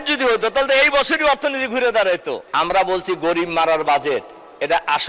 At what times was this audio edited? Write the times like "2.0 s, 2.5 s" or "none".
2.4 s